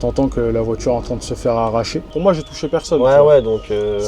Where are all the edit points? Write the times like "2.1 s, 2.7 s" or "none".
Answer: 2.1 s